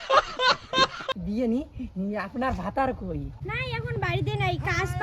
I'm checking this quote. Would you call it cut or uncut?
uncut